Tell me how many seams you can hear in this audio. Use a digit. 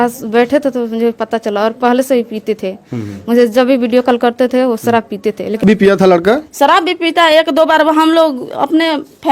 1